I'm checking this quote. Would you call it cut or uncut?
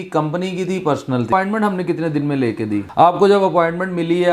cut